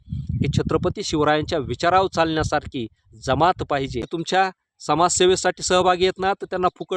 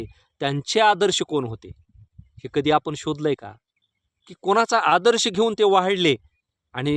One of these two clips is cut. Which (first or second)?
first